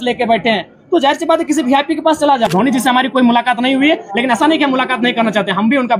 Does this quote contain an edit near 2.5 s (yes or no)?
yes